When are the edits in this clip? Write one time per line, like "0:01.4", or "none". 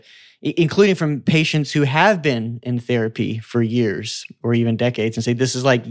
none